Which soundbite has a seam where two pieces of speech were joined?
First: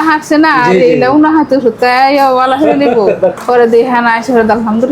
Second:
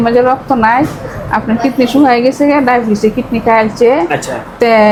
first; 1 cut; at 3.4 s

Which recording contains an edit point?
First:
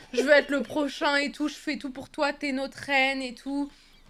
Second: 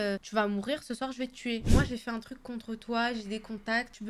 second; 1 cut; at 1.6 s

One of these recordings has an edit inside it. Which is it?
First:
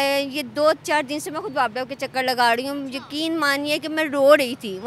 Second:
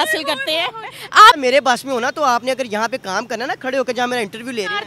second; 1 cut; at 1.4 s

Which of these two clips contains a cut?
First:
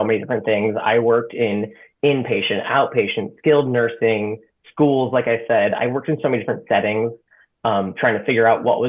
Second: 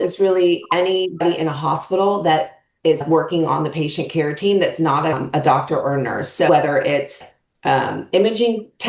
second; 3 cuts; at 1.2 s, 3.0 s, 5.2 s

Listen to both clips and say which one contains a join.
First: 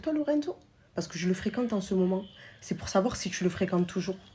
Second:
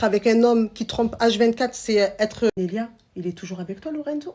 second; 1 cut; at 2.5 s

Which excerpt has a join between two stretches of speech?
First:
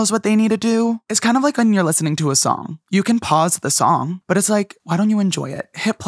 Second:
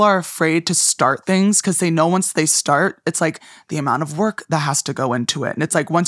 first; 3 cuts; at 1.1 s, 2.7 s, 4.4 s

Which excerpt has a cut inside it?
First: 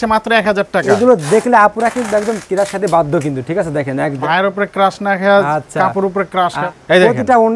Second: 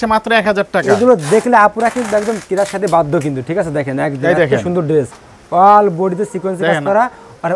first; 2 cuts; at 4.2 s, 6.6 s

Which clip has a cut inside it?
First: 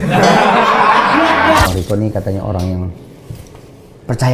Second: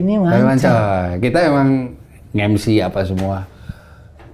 first; 1 cut; at 1.7 s

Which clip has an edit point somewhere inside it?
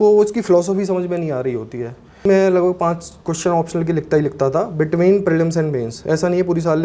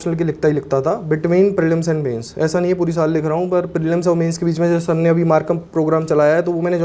first; 1 cut; at 2.3 s

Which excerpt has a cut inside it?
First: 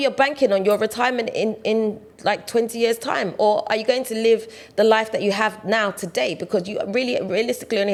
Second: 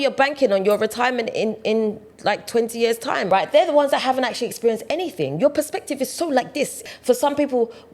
second; 2 cuts; at 3.2 s, 6.8 s

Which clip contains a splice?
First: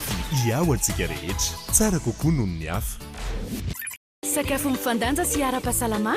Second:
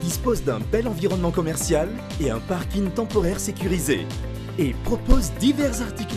first; 1 cut; at 4.2 s

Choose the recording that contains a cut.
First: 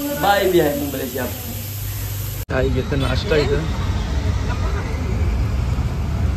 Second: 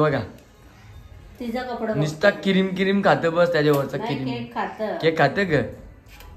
first; 1 cut; at 2.3 s

